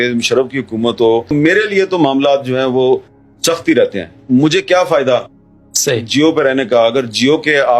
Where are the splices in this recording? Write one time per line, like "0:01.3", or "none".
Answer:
none